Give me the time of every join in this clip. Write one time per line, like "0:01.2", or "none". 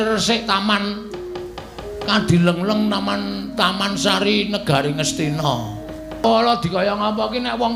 0:06.2

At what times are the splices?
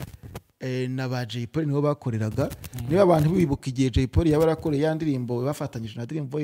none

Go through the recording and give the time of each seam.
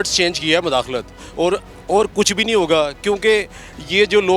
none

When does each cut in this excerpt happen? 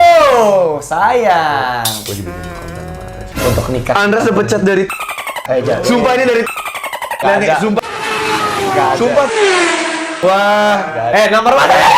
0:03.2
0:11.1

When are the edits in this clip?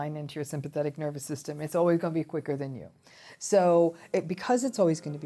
0:04.0

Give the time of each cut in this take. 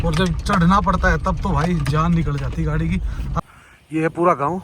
0:03.4

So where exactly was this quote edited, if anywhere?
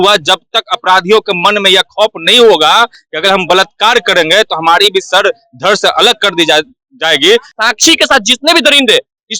0:07.5

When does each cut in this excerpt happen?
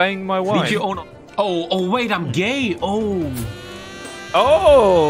0:00.9

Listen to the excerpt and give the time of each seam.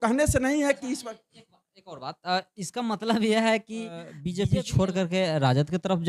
0:04.2

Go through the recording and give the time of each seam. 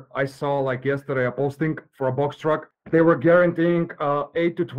0:02.7

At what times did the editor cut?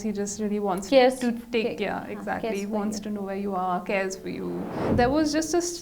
0:04.9

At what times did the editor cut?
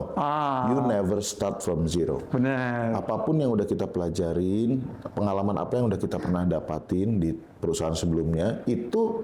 none

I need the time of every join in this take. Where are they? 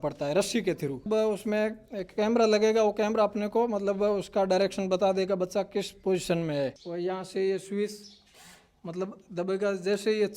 0:01.1
0:06.8

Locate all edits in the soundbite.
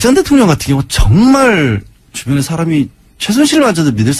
none

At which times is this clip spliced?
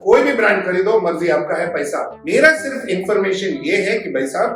none

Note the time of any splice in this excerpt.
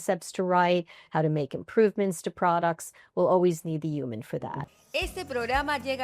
0:04.6

